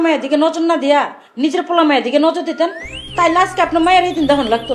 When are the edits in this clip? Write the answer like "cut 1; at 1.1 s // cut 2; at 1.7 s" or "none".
none